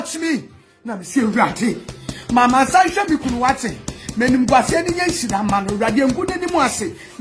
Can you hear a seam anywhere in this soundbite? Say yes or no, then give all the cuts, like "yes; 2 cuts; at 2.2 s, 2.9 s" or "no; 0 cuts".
no; 0 cuts